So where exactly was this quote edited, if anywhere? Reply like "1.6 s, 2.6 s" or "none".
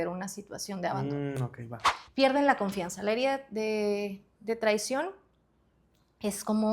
1.9 s